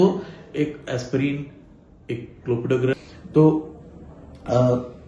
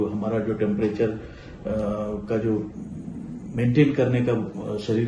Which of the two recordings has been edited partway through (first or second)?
first